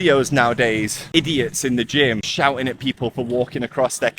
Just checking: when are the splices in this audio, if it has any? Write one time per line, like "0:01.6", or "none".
0:01.1
0:02.3